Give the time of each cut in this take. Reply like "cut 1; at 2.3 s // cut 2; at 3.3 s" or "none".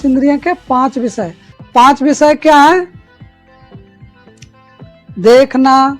cut 1; at 1.5 s